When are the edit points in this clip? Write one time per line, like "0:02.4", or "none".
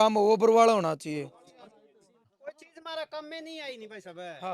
0:02.3